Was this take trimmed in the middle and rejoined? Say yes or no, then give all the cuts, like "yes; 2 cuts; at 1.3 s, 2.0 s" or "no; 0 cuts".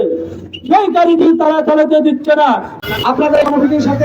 yes; 1 cut; at 2.7 s